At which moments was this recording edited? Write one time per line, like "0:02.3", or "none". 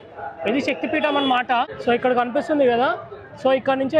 0:01.7

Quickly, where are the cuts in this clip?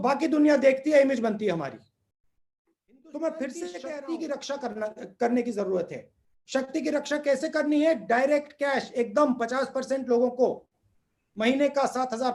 0:03.9

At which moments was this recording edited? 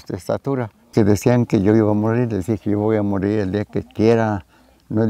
0:00.9

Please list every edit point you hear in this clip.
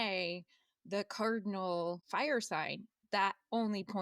0:02.0

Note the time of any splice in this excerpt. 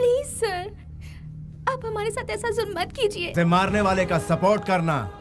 0:03.2

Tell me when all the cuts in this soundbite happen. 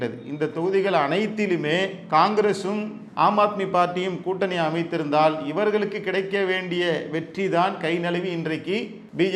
none

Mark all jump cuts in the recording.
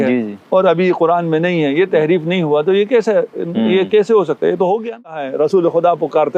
0:05.3

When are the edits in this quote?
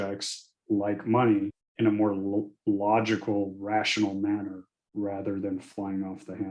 0:01.6

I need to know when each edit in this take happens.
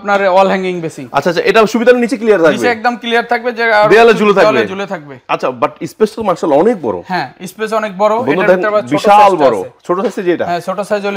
none

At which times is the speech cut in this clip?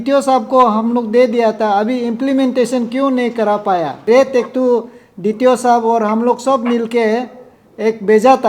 0:04.0

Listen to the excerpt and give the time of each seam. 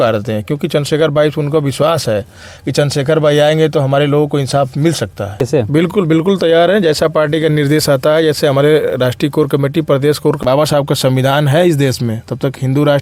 0:05.4
0:10.2

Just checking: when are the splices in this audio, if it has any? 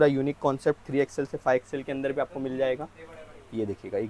none

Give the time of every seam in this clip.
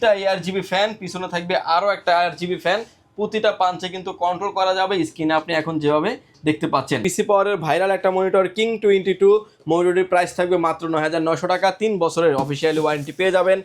0:07.1

